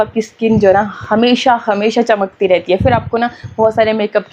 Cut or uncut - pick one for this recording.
uncut